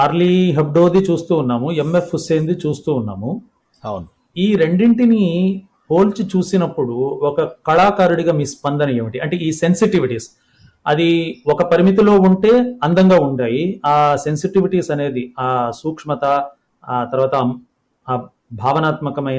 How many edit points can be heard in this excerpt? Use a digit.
0